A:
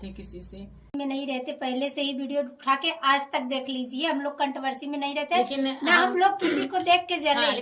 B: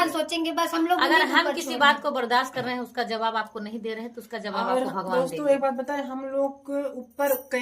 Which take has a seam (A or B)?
A